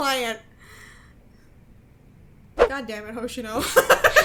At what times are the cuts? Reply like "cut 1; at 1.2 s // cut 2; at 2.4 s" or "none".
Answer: none